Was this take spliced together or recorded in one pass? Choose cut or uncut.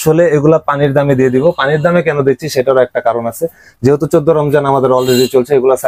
uncut